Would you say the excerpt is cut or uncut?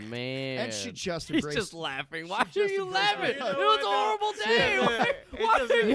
uncut